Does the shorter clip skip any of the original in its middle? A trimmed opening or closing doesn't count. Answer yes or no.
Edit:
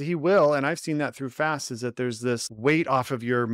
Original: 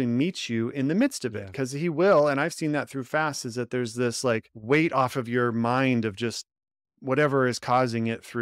yes